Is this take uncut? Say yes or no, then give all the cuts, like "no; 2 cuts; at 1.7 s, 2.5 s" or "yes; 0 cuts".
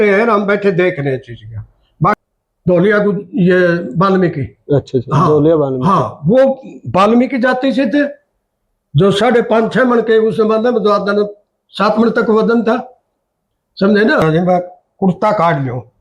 no; 2 cuts; at 2.2 s, 14.2 s